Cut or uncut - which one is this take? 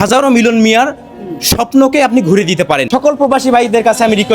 cut